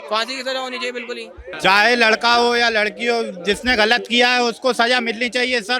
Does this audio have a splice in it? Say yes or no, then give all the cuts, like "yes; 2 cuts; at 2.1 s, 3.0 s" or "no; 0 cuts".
yes; 1 cut; at 1.5 s